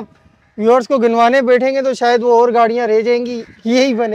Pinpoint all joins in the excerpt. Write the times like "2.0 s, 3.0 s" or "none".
none